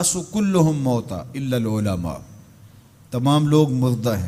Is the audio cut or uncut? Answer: uncut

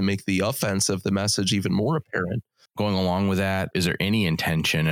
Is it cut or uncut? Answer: cut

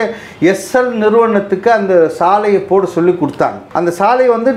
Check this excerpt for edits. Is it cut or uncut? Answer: cut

